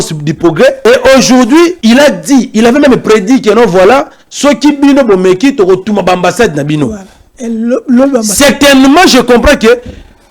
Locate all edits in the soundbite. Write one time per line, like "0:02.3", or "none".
0:00.8
0:01.8